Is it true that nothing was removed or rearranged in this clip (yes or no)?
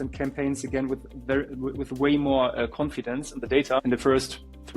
no